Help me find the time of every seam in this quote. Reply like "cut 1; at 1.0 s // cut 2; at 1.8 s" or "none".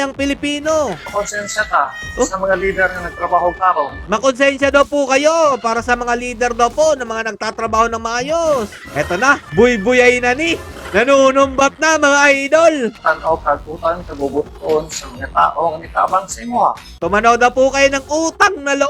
cut 1; at 1.0 s // cut 2; at 4.0 s // cut 3; at 8.8 s // cut 4; at 13.0 s // cut 5; at 16.9 s